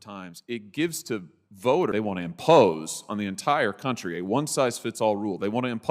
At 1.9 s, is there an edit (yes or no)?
yes